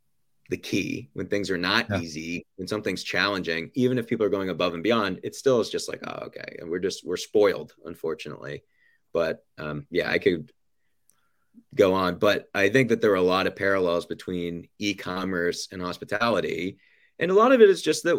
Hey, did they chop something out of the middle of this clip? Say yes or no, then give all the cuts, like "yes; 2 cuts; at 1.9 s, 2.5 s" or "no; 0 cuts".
no; 0 cuts